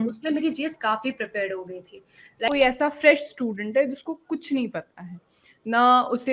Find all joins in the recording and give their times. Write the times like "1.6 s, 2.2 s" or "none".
2.5 s